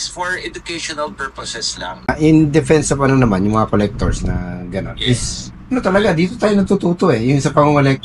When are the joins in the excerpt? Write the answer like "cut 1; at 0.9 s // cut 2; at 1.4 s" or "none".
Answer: cut 1; at 2.1 s